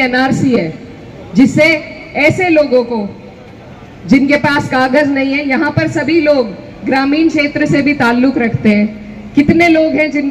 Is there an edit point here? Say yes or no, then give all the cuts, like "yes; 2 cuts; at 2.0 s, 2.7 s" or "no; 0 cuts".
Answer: no; 0 cuts